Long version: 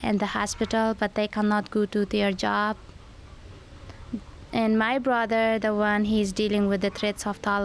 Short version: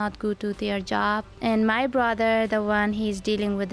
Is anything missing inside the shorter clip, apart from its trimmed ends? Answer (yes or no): yes